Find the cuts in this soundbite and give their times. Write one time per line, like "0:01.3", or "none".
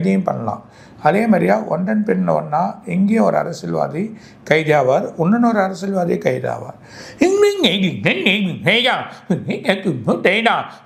none